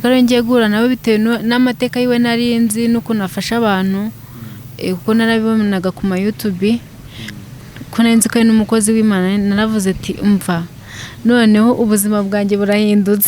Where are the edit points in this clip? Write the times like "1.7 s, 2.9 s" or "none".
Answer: none